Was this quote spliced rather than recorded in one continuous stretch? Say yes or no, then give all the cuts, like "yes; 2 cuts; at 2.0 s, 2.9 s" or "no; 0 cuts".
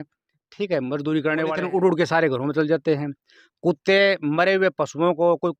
yes; 1 cut; at 1.6 s